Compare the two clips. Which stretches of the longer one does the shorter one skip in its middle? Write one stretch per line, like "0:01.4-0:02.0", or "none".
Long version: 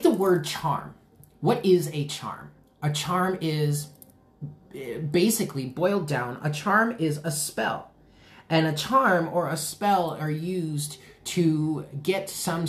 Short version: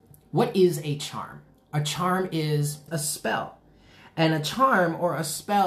0:04.0-0:07.2